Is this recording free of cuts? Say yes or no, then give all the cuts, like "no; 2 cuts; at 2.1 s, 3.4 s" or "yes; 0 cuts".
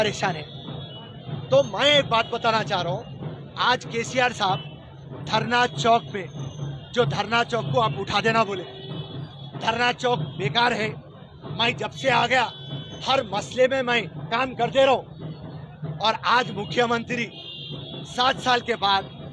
yes; 0 cuts